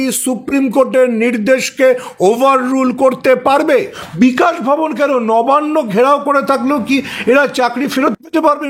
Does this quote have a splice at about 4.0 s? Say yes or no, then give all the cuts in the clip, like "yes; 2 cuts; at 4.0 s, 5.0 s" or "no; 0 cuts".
yes; 1 cut; at 4.0 s